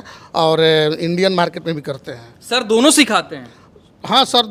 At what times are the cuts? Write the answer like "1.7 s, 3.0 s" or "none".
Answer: none